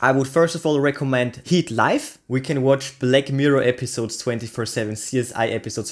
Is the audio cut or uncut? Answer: cut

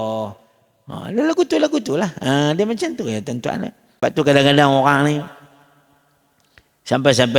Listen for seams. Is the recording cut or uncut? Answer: cut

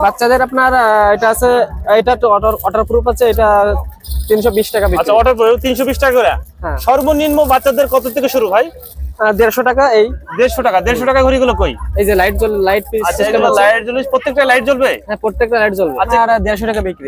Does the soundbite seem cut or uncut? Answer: cut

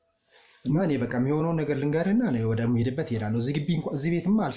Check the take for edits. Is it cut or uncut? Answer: uncut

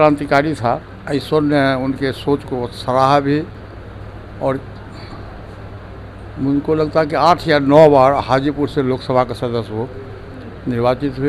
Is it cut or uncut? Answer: uncut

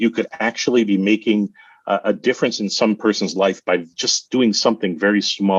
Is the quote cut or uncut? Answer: uncut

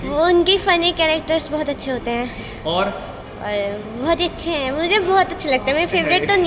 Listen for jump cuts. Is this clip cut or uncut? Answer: uncut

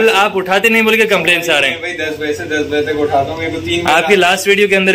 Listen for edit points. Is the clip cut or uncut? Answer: uncut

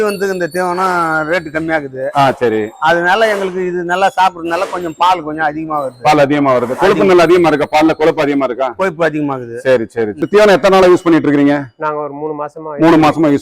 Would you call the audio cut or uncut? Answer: cut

